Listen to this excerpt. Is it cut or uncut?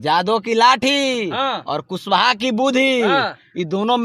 uncut